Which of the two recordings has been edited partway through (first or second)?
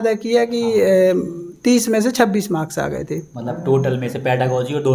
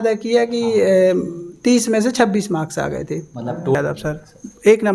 second